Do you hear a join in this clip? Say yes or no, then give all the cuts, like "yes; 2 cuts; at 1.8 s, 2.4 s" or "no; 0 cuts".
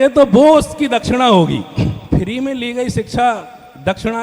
yes; 1 cut; at 2.0 s